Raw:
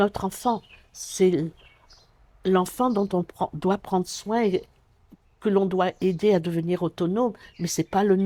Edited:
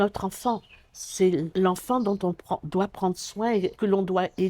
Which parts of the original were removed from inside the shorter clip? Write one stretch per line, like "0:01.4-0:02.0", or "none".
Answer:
0:01.5-0:02.4
0:04.6-0:05.4